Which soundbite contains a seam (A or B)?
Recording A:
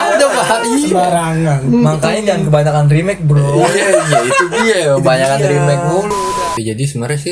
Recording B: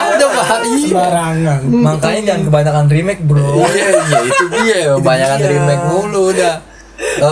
A